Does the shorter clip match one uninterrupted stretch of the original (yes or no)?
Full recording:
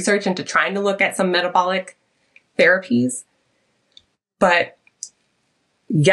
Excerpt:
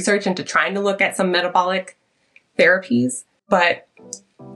no